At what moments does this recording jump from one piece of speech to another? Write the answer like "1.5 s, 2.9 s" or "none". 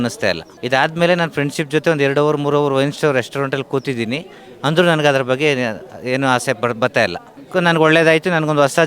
7.3 s